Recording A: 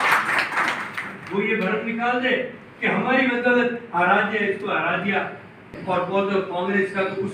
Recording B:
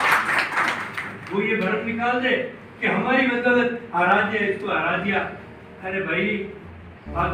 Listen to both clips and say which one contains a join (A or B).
A